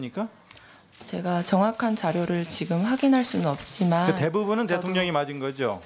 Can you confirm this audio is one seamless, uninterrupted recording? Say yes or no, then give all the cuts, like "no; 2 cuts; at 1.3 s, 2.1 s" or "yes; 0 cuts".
no; 1 cut; at 2.5 s